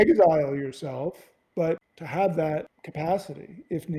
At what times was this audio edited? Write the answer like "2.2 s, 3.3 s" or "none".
none

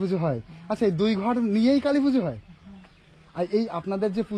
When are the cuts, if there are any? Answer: none

